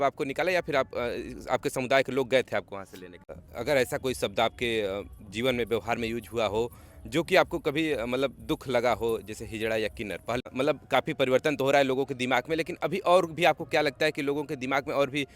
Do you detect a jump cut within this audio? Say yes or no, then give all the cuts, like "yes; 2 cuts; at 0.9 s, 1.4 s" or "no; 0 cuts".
yes; 2 cuts; at 3.3 s, 10.5 s